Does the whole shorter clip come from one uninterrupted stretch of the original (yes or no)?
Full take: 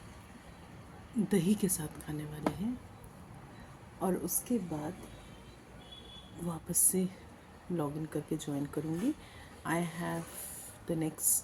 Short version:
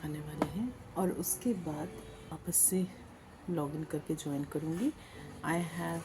no